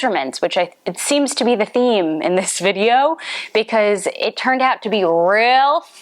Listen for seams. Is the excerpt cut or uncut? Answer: uncut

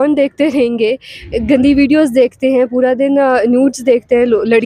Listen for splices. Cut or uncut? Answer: uncut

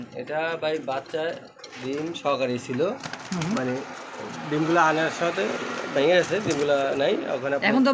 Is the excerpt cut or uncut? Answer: uncut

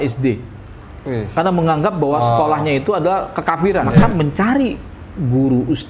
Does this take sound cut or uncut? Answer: cut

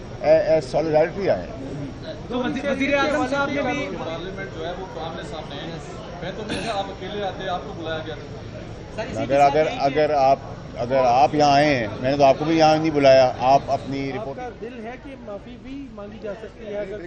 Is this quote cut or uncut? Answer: cut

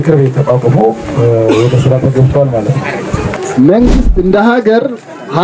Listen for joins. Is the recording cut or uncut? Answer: cut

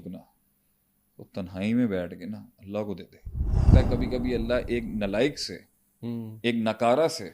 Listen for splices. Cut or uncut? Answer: cut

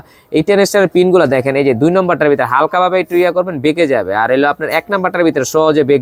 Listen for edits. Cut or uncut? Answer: uncut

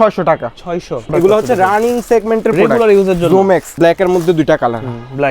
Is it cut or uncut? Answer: cut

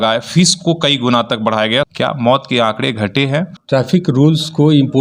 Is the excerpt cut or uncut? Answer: cut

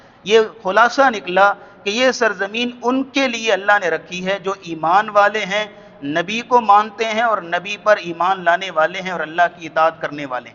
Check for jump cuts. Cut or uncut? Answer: uncut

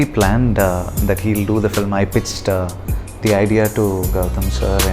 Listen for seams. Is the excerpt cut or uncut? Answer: uncut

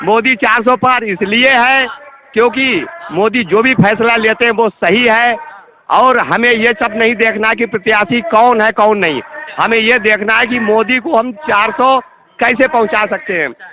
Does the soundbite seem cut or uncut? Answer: uncut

